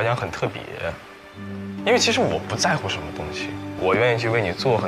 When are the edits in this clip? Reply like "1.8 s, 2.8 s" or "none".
none